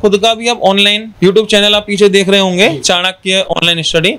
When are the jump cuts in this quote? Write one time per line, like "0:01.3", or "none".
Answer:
0:01.0